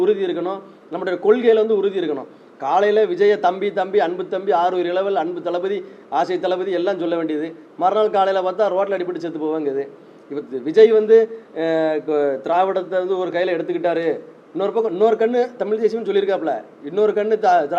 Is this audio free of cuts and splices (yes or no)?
yes